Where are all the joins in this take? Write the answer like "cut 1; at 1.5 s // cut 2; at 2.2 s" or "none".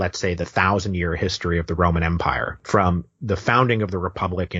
cut 1; at 2.5 s